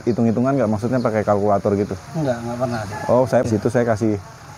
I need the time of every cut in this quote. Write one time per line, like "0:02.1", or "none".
0:03.5